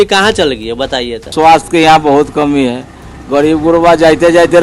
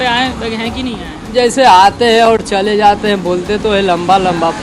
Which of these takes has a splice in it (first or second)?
first